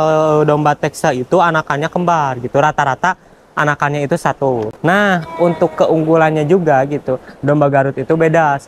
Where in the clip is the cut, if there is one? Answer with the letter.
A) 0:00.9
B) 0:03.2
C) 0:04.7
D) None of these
C